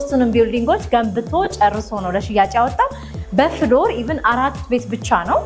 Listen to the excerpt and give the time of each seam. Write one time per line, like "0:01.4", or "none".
0:03.1